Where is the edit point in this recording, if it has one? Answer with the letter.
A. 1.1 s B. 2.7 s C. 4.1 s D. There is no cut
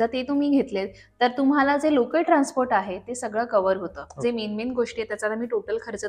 C